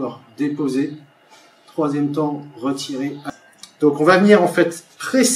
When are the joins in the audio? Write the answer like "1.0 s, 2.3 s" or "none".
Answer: 3.2 s